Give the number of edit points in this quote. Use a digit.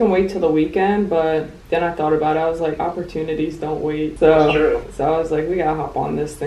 2